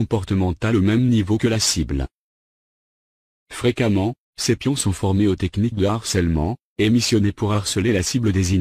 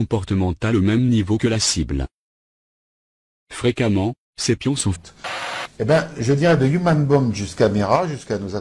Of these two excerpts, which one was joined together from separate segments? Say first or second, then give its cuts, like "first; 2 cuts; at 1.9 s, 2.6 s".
first; 1 cut; at 5.0 s